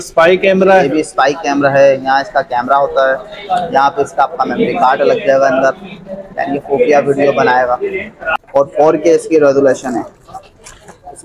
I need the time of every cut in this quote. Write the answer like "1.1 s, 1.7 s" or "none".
8.3 s